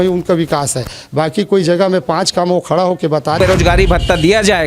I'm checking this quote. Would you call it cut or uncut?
cut